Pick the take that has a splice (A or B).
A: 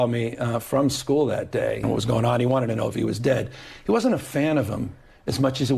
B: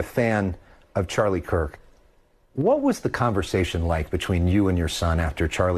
A